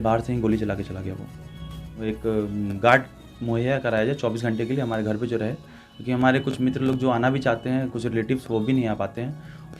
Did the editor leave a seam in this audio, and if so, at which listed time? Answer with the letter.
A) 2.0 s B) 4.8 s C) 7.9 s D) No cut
A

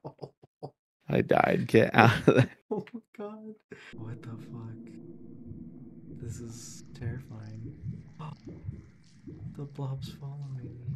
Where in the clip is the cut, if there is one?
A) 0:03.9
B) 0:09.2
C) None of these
A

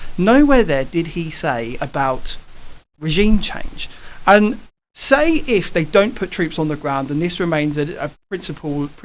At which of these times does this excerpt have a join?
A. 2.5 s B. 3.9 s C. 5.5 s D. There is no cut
D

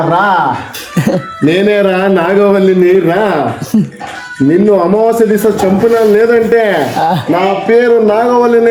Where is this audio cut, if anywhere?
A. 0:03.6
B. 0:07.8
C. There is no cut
C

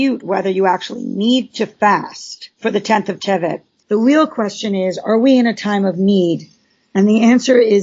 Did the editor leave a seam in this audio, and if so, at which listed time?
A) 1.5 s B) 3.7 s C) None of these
B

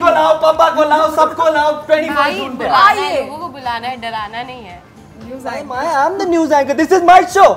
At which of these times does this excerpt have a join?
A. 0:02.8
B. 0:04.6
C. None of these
C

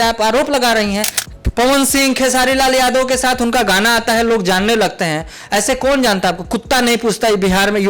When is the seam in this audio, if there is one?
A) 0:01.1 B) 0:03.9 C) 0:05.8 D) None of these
A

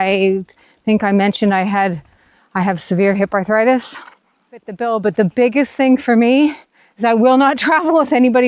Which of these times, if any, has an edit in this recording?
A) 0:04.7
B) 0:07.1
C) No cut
A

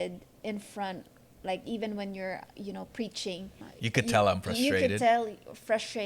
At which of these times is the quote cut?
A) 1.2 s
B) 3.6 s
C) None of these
B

